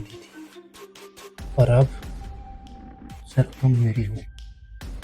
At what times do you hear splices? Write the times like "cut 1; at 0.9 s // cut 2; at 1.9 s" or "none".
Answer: cut 1; at 1.9 s // cut 2; at 3.3 s